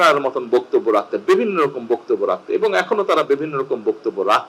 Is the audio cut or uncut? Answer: uncut